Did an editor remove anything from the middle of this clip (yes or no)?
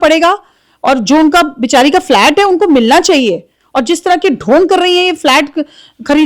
no